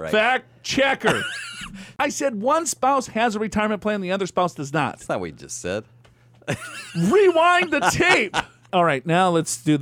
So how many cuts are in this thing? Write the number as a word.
two